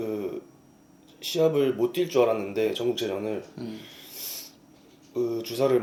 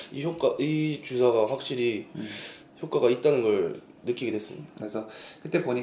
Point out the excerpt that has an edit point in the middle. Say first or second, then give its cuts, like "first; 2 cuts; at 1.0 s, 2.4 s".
second; 1 cut; at 4.9 s